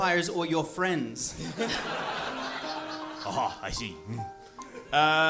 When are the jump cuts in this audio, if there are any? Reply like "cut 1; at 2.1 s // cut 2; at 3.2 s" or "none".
none